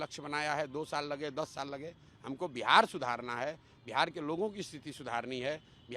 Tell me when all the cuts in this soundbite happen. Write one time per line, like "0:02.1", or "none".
none